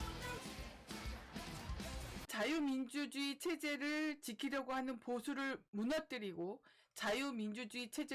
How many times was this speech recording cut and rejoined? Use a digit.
1